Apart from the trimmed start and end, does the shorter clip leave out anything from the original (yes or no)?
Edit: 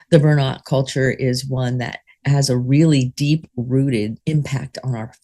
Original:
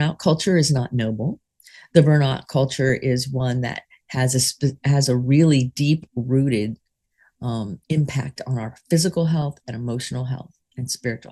yes